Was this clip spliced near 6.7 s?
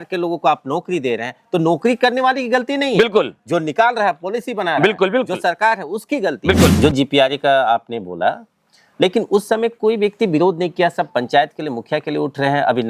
yes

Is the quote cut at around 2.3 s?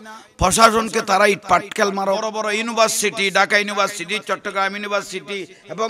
yes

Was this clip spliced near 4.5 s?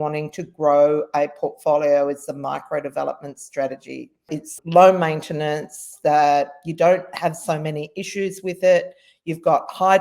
yes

